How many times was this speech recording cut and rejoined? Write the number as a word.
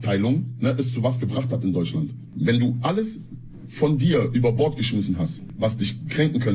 two